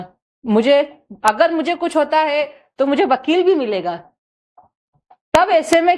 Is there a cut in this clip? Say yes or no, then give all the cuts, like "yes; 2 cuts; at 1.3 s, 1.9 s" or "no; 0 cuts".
no; 0 cuts